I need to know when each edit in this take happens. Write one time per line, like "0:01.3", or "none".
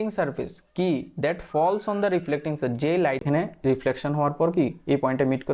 0:03.2